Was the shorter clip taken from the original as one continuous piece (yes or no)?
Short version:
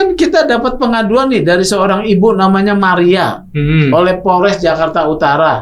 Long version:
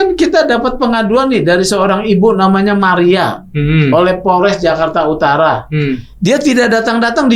yes